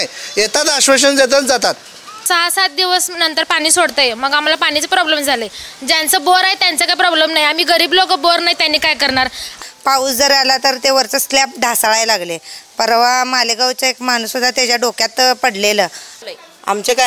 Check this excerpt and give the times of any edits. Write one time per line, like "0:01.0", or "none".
0:02.2
0:09.6
0:16.1